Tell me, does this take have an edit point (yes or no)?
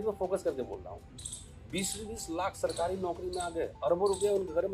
no